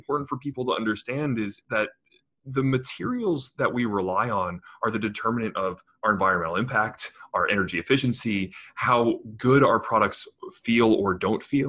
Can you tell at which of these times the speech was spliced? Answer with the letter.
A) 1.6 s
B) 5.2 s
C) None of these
A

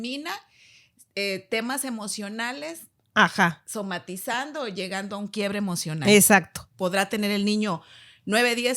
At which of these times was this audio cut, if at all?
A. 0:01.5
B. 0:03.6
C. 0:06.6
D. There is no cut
C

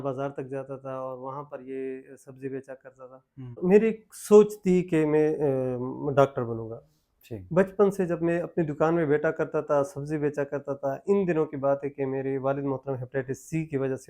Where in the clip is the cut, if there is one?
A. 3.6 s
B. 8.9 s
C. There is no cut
A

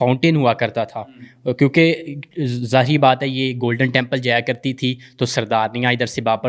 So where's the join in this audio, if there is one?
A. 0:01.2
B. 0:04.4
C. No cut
C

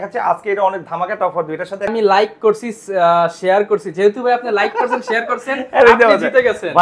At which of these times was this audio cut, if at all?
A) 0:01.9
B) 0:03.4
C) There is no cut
A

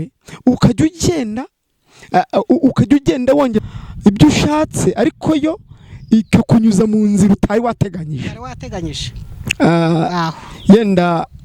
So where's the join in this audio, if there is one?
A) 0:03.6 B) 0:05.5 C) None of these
A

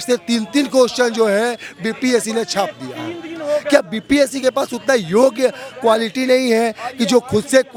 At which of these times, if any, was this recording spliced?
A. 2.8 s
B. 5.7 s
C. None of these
C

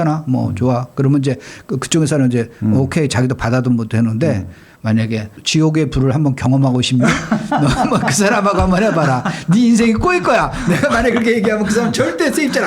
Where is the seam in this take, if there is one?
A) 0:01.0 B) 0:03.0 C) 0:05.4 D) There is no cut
C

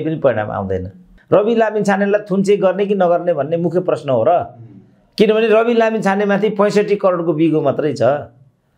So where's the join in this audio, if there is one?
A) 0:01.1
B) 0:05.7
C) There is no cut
A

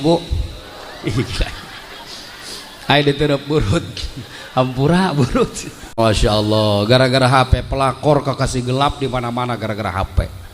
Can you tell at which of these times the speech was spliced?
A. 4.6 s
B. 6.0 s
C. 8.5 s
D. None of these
B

